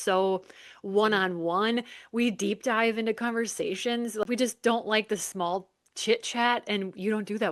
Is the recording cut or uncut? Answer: cut